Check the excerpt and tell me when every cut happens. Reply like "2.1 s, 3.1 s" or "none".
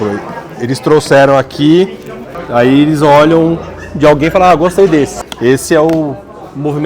2.4 s, 5.2 s